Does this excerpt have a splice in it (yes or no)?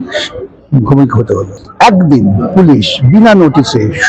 yes